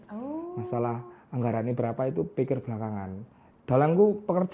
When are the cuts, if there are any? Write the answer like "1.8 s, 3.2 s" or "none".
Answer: 3.4 s